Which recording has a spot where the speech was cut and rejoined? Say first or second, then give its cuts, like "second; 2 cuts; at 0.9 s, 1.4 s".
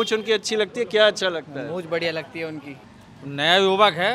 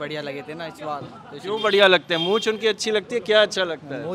first; 1 cut; at 2.8 s